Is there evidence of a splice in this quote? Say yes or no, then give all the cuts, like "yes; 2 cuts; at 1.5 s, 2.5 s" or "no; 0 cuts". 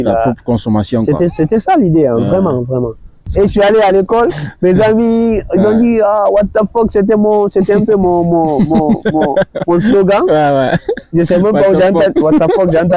yes; 1 cut; at 3.3 s